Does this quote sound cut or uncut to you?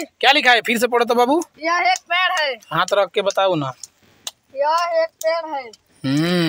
uncut